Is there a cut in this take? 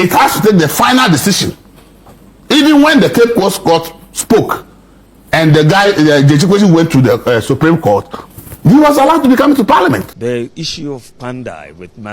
yes; 1 cut; at 10.1 s

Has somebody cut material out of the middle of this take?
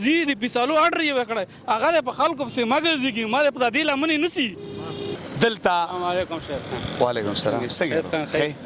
yes; 1 cut; at 5.1 s

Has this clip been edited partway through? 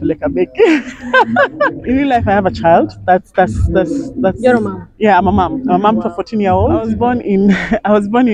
yes; 2 cuts; at 1.8 s, 6.9 s

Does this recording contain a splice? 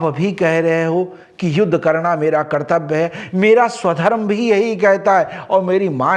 no; 0 cuts

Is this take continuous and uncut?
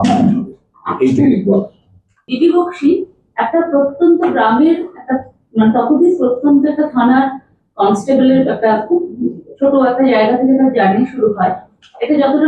no; 1 cut; at 2.2 s

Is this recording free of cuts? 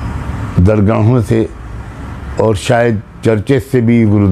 yes; 0 cuts

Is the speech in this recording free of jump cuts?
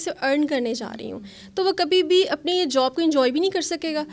yes; 0 cuts

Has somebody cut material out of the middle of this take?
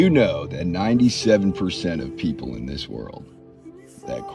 yes; 1 cut; at 3.0 s

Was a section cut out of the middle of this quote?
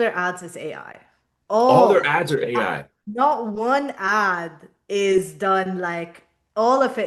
no; 0 cuts

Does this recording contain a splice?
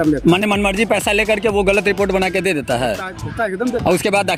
no; 0 cuts

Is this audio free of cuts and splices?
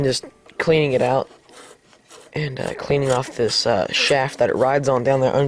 no; 1 cut; at 3.0 s

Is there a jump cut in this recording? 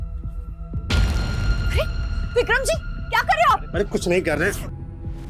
no; 0 cuts

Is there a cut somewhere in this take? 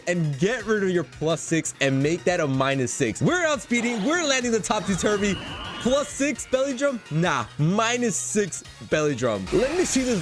yes; 2 cuts; at 3.2 s, 9.4 s

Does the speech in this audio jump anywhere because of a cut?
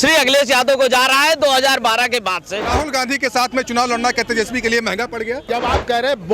yes; 2 cuts; at 2.6 s, 5.4 s

